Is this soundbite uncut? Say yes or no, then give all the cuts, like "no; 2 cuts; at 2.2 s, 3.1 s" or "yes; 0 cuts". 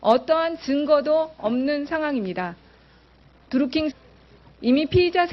yes; 0 cuts